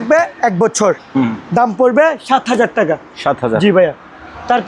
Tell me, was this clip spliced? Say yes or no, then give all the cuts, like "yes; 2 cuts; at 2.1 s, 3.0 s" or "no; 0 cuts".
no; 0 cuts